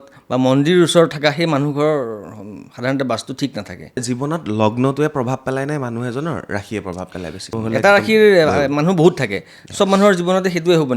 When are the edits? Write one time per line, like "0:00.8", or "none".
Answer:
0:04.0
0:07.5